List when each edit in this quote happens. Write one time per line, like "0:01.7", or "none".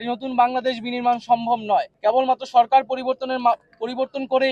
0:01.9